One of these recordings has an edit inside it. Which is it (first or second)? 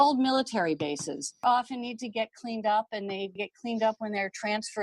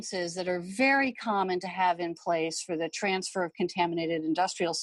first